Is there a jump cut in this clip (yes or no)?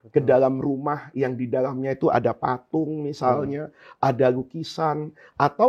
no